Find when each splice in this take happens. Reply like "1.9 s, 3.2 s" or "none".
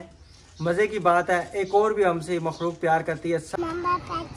3.5 s